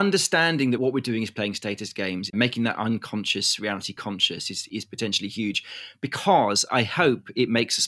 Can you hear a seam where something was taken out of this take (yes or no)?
yes